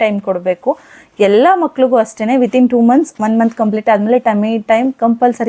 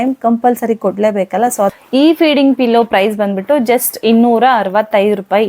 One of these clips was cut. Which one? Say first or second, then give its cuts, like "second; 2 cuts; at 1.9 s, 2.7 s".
second; 1 cut; at 1.8 s